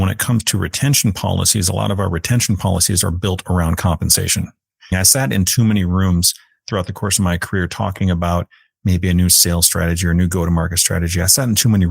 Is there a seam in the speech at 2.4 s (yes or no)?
no